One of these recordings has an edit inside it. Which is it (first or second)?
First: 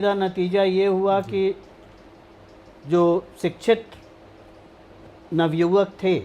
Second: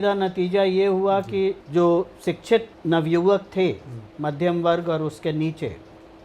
second